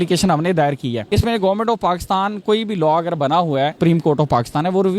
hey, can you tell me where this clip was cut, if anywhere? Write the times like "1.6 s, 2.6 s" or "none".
1.0 s, 3.7 s